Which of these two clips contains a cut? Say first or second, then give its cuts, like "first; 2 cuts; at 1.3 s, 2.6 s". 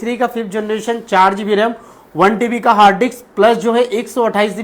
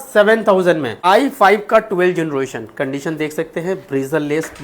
second; 1 cut; at 1.0 s